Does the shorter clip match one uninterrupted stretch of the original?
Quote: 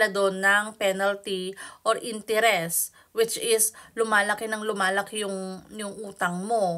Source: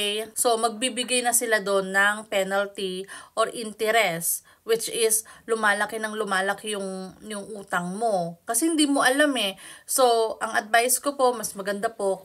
yes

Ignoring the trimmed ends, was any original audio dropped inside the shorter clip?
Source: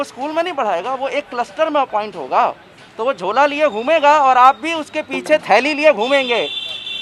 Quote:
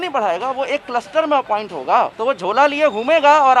yes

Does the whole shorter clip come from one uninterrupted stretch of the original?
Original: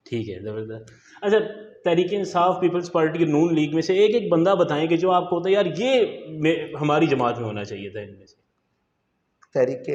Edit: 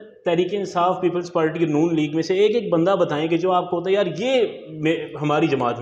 yes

